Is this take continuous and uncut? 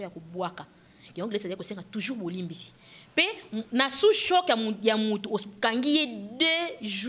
yes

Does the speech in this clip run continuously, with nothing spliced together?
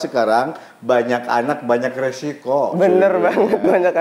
yes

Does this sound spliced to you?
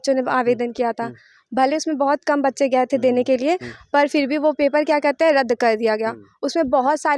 no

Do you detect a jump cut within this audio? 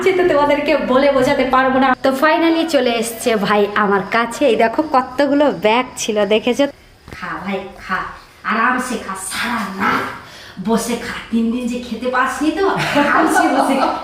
yes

